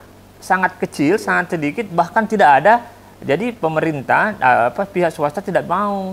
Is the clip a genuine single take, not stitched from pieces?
yes; 0 cuts

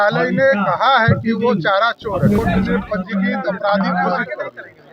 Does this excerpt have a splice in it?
yes; 1 cut; at 2.4 s

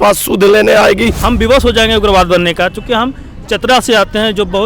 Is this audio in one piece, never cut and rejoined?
no; 1 cut; at 1.2 s

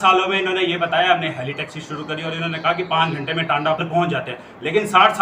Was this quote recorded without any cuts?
no; 1 cut; at 3.8 s

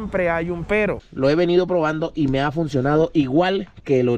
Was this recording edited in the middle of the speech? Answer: yes; 1 cut; at 1.0 s

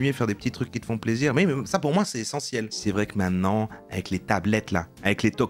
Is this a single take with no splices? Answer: no; 1 cut; at 2.7 s

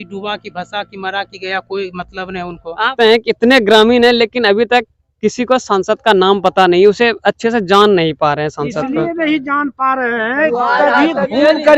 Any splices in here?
yes; 1 cut; at 2.9 s

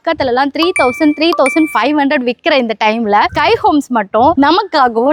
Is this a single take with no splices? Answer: yes; 0 cuts

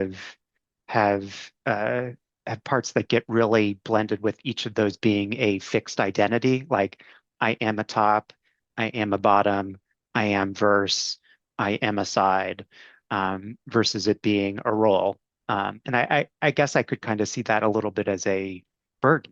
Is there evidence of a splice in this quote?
no; 0 cuts

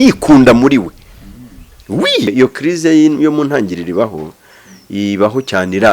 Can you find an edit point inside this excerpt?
yes; 1 cut; at 2.3 s

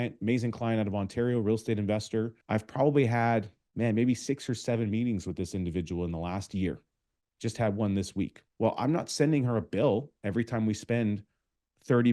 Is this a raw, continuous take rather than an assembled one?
no; 3 cuts; at 2.4 s, 3.6 s, 8.4 s

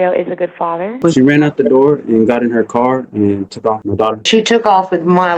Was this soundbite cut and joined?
yes; 2 cuts; at 1.0 s, 4.3 s

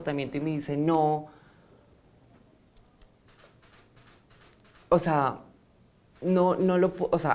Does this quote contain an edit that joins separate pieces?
no; 0 cuts

